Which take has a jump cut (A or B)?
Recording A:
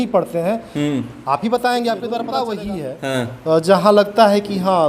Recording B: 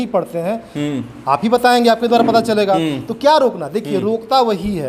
A